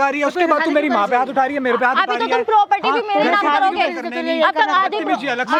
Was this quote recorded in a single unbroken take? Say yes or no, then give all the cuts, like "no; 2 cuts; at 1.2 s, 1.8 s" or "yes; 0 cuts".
yes; 0 cuts